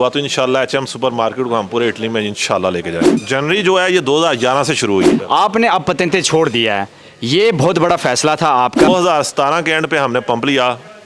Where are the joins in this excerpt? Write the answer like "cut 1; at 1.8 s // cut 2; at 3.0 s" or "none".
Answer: cut 1; at 3.1 s // cut 2; at 5.1 s // cut 3; at 8.9 s